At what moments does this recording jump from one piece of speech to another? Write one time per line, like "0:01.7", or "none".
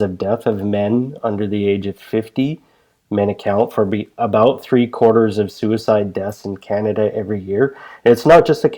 none